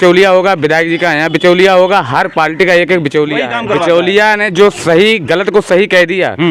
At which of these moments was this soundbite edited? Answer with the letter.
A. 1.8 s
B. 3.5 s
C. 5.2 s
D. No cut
B